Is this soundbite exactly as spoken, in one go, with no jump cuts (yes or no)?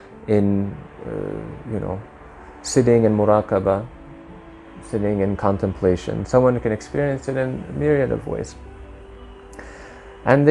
yes